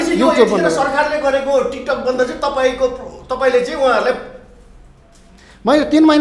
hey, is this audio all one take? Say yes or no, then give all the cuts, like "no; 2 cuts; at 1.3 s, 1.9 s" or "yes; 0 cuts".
yes; 0 cuts